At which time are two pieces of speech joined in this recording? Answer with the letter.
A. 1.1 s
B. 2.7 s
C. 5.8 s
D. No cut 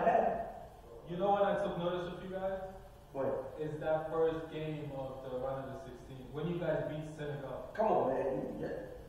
A